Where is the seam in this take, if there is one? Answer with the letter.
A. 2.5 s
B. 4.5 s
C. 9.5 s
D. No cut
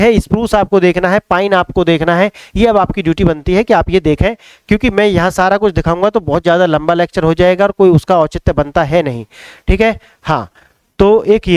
D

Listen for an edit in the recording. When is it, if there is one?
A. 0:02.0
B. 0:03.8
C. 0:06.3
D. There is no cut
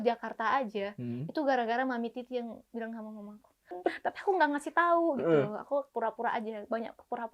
B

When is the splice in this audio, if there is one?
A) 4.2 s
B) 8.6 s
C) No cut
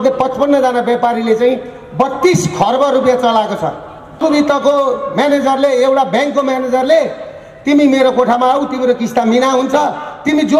A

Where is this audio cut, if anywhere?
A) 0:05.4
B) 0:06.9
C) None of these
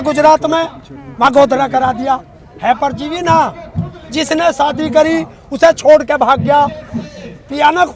C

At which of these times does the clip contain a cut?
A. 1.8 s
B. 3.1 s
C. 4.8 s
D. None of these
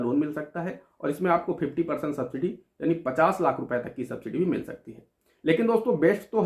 D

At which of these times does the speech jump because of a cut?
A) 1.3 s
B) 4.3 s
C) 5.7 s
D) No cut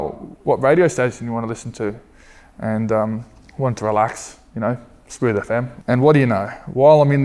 C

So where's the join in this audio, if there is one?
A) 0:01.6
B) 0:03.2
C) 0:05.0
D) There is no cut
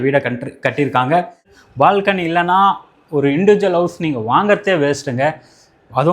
A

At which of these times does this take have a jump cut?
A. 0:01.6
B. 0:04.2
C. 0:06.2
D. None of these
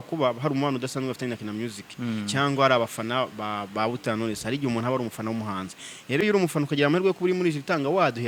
D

